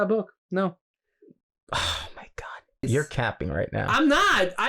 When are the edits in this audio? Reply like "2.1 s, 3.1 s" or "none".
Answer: 2.9 s